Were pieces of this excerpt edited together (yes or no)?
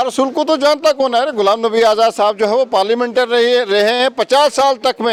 no